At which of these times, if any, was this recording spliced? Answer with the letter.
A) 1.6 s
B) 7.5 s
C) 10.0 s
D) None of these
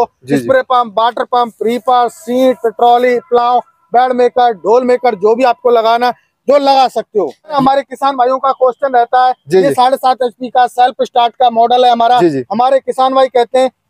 B